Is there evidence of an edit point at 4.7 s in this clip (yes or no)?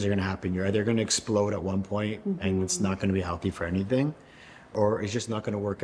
yes